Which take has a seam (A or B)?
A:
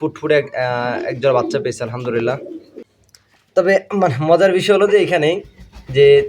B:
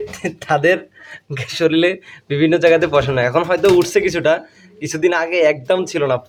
A